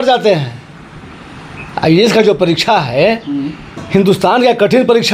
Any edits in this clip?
no; 0 cuts

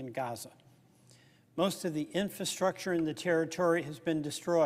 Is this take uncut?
no; 1 cut; at 1.6 s

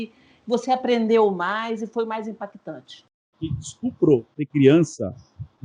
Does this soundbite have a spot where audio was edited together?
yes; 1 cut; at 3.2 s

